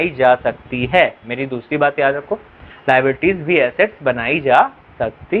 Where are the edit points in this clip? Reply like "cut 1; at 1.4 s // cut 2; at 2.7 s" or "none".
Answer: none